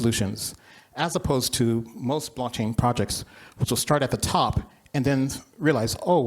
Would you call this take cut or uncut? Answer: cut